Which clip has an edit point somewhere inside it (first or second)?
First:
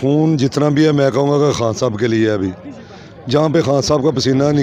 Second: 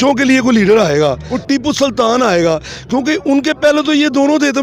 second